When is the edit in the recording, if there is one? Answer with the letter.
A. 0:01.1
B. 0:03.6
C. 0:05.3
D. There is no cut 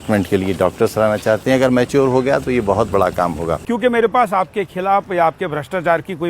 B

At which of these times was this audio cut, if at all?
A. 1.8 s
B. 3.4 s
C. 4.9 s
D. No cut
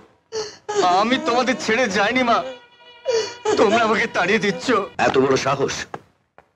C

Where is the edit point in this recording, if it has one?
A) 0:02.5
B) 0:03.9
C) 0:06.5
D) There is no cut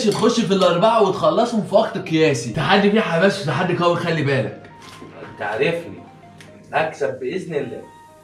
A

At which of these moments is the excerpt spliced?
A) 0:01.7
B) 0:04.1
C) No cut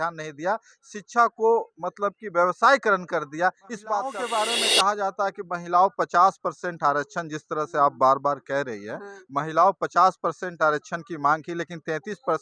B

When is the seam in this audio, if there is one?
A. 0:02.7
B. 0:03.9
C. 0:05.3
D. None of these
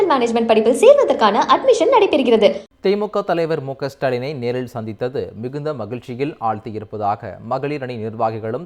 A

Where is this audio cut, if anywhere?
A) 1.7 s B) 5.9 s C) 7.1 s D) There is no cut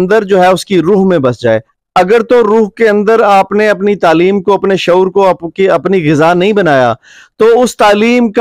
D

